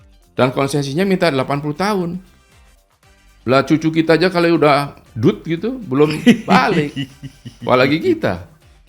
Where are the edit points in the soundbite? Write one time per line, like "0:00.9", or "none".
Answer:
none

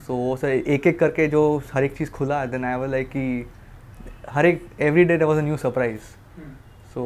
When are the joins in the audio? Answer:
none

